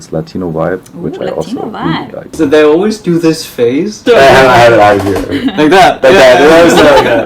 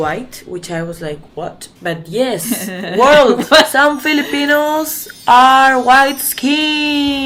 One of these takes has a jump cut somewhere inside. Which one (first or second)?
first